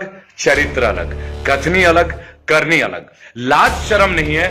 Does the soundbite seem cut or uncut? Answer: cut